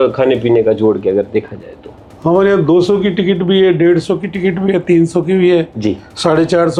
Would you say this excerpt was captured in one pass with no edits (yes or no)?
yes